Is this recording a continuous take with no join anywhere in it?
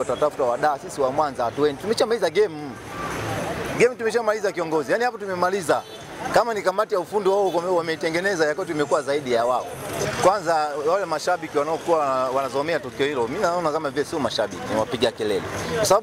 yes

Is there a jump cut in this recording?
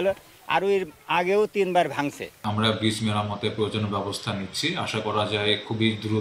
yes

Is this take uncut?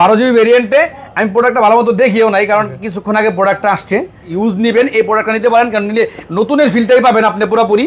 no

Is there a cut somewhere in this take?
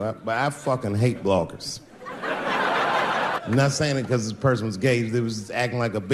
yes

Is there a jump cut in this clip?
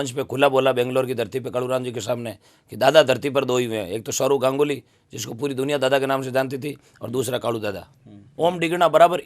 yes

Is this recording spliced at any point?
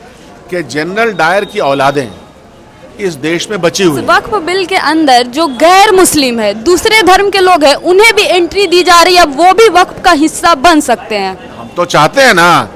yes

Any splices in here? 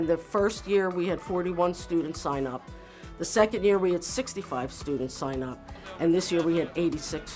no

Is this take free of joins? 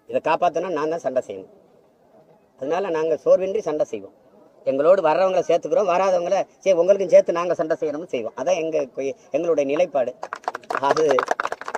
yes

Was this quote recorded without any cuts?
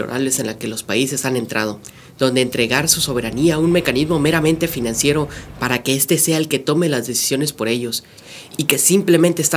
yes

